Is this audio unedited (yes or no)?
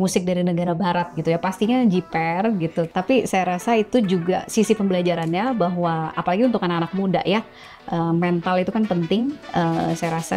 no